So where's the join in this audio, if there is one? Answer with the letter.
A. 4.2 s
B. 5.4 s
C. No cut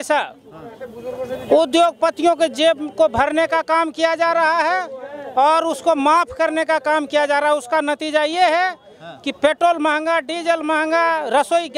C